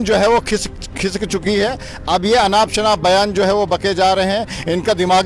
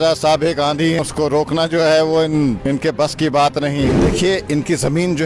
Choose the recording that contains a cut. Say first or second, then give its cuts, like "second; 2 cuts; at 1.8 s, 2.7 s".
second; 3 cuts; at 1.0 s, 2.6 s, 4.0 s